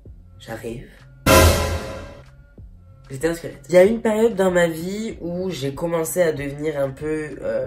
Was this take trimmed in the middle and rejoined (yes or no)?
no